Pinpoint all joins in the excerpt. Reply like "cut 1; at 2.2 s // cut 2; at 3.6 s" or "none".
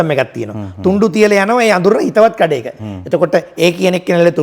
none